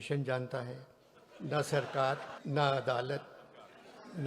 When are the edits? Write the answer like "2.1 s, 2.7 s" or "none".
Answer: 2.3 s